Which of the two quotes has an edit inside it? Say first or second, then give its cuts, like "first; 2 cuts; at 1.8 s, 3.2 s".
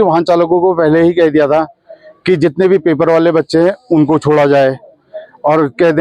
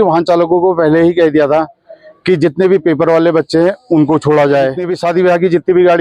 second; 1 cut; at 4.9 s